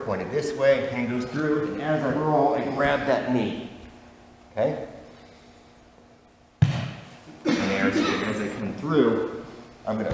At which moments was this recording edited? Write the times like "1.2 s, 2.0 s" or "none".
8.2 s